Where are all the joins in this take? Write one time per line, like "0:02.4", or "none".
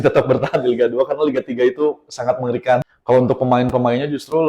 0:02.8